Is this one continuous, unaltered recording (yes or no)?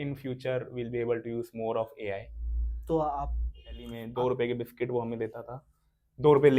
no